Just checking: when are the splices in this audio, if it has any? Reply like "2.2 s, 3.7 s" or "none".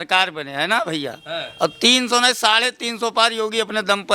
none